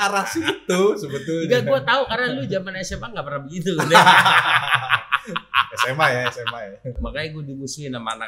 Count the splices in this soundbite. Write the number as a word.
one